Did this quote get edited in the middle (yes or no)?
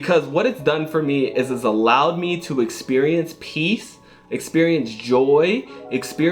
no